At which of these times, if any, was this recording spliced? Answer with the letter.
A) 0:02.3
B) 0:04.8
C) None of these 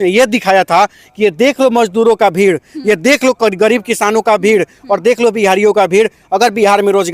C